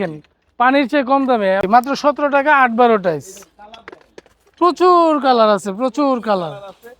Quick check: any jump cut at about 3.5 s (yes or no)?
no